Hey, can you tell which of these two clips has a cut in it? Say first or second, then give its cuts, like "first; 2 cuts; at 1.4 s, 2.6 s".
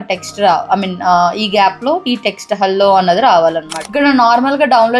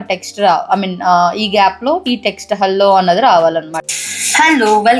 first; 1 cut; at 3.8 s